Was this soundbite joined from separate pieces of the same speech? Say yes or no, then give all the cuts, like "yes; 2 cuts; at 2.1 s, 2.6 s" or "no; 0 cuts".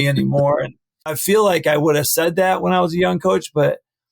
yes; 1 cut; at 1.2 s